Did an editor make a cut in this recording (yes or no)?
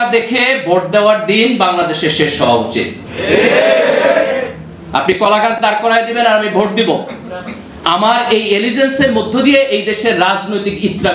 no